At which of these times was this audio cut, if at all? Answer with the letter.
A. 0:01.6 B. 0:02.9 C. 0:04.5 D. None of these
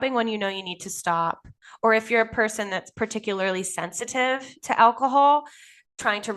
D